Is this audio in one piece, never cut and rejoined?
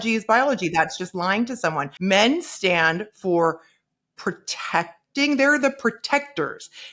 no; 1 cut; at 1.9 s

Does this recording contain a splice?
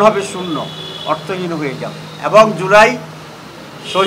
no; 0 cuts

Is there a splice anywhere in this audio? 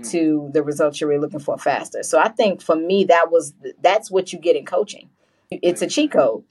no; 0 cuts

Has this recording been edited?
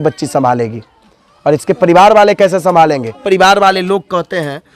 yes; 1 cut; at 3.2 s

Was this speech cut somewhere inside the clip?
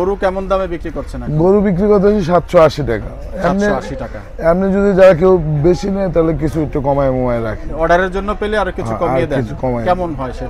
no; 0 cuts

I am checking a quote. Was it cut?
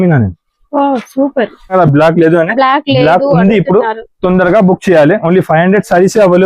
yes; 1 cut; at 1.7 s

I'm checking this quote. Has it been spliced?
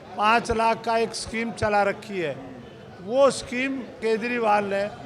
yes; 1 cut; at 4.0 s

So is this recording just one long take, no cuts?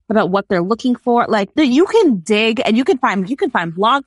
no; 1 cut; at 1.5 s

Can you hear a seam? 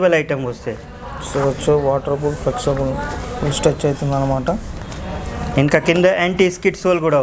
no; 0 cuts

